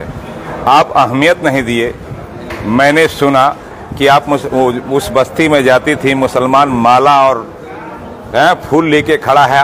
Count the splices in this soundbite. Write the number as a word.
zero